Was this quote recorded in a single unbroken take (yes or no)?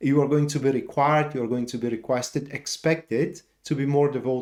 yes